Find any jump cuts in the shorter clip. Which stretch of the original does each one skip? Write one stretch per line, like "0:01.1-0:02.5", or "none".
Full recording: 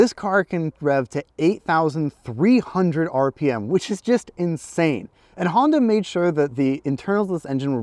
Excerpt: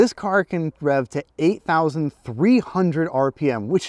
none